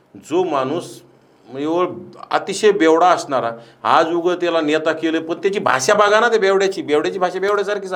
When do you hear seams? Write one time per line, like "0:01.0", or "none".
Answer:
none